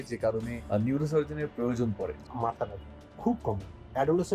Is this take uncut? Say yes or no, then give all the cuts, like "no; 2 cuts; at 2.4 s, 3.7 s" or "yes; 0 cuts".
no; 1 cut; at 2.2 s